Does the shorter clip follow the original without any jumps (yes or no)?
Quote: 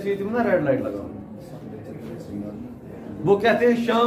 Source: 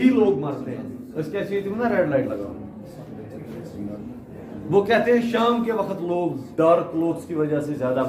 yes